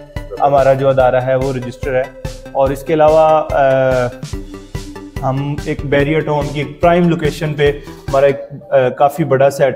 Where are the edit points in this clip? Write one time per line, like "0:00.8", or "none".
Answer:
none

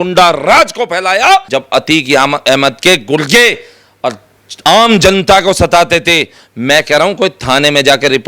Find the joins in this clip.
0:01.5

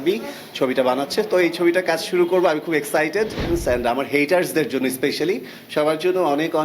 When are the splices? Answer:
0:03.5

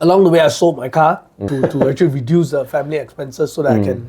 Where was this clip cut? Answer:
0:01.5

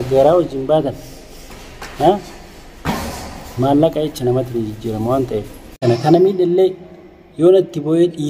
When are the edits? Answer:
0:05.8

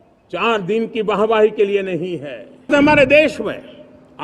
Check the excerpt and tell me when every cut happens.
0:02.7

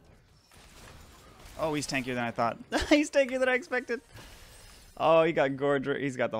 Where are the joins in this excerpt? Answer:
none

